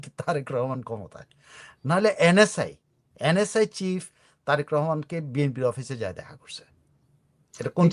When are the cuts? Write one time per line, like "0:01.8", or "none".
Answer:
none